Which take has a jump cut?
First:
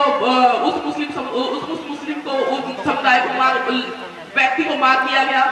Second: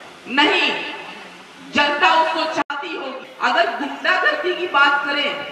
second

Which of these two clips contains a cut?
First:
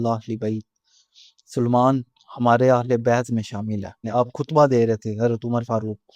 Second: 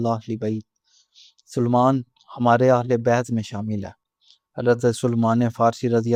first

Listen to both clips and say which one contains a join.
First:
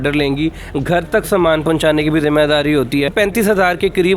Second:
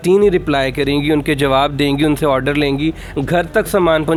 first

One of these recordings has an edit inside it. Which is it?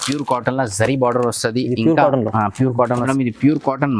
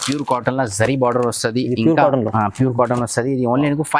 first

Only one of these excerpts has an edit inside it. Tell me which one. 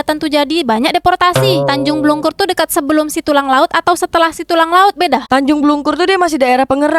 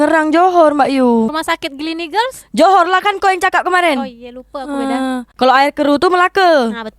second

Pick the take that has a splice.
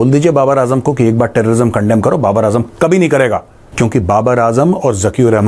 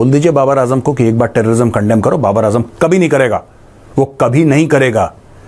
first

